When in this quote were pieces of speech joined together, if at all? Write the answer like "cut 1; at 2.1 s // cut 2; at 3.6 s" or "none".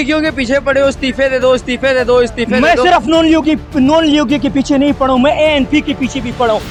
none